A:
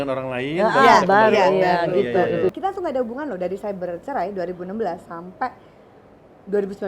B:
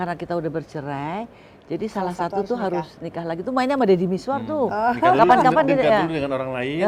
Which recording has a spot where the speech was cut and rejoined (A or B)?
A